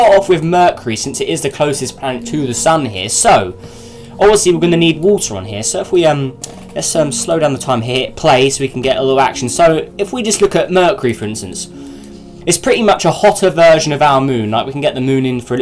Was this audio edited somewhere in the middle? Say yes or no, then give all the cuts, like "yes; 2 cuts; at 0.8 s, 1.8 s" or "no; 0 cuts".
yes; 1 cut; at 1.7 s